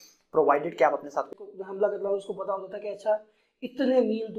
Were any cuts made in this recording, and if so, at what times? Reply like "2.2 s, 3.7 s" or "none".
1.4 s